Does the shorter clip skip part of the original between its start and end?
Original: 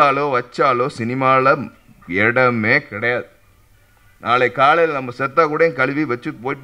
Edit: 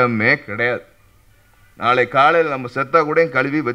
no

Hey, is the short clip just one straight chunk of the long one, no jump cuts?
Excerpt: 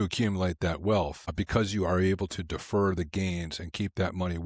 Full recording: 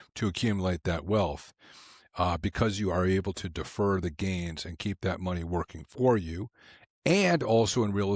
no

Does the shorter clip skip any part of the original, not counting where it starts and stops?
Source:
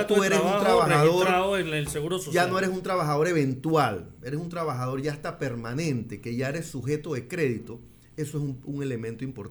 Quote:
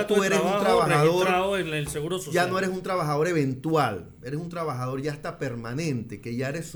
no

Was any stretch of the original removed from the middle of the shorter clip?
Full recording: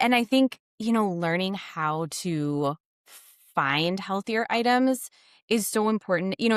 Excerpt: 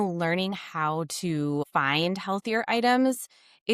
yes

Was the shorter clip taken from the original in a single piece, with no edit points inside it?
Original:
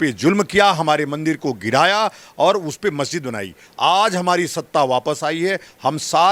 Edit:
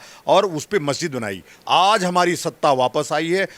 yes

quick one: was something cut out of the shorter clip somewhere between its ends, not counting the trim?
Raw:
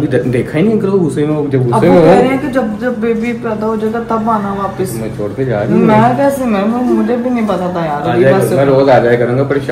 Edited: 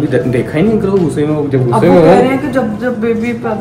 no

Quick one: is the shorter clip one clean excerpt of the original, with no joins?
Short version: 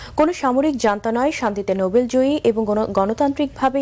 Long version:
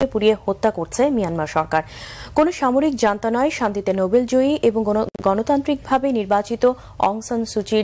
no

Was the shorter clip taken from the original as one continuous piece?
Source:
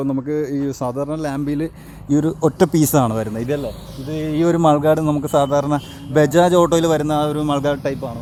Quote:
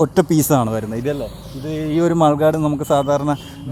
yes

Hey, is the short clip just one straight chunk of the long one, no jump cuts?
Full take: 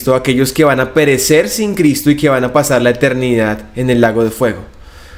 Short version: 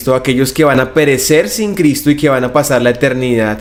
yes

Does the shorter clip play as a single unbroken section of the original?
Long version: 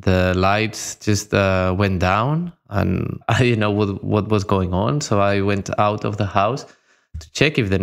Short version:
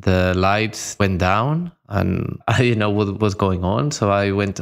no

